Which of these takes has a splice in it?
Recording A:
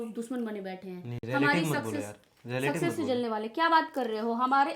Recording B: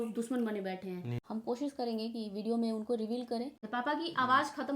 B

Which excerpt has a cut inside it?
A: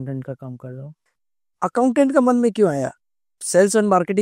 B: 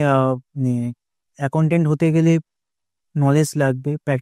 A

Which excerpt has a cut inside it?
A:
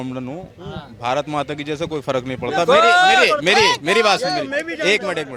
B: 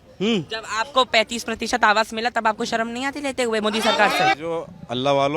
B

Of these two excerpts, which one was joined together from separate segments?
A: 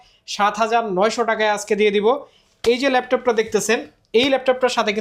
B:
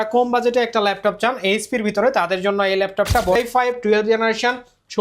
B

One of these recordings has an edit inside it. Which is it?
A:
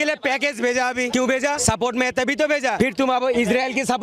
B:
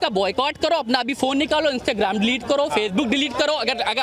A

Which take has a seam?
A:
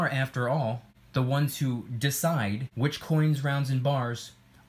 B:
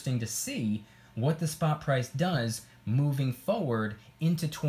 A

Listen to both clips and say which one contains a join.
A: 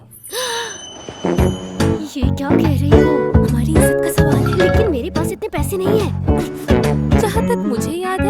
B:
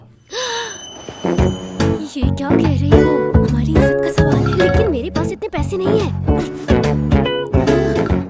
A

